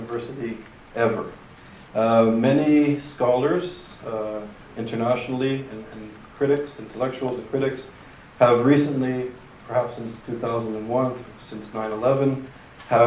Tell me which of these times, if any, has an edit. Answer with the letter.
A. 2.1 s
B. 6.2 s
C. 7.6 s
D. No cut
A